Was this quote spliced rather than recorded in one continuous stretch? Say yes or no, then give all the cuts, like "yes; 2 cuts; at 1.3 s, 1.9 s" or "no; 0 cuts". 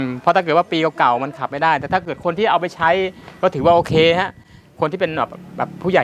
no; 0 cuts